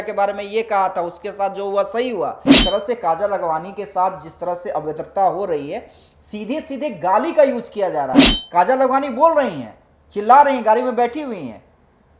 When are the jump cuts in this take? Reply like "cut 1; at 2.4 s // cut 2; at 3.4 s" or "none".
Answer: cut 1; at 2.6 s